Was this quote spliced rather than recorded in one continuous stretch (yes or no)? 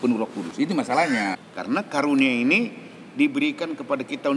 yes